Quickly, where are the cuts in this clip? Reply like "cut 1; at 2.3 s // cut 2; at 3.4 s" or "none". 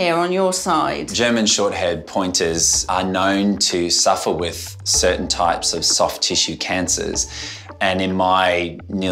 cut 1; at 1.1 s